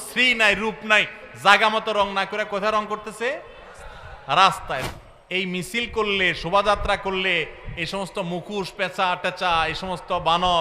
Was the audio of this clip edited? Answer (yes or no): yes